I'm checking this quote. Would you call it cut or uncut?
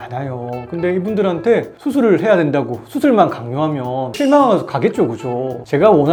uncut